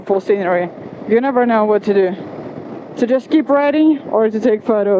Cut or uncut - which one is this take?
uncut